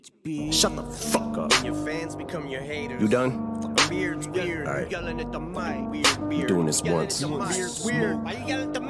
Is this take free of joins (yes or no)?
no